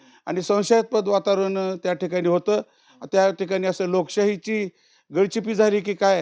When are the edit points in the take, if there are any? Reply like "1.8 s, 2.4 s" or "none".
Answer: none